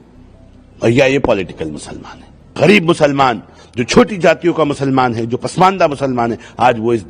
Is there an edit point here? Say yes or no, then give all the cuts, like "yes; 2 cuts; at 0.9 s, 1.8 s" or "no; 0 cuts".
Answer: yes; 1 cut; at 2.5 s